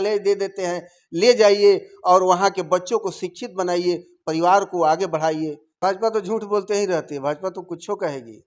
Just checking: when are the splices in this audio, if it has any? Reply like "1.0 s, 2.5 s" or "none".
5.7 s